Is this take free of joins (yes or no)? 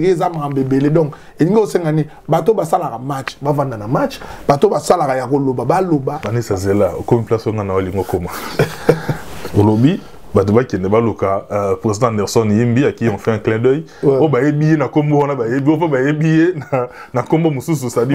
no